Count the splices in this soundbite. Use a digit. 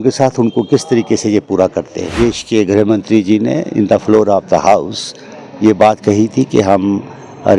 1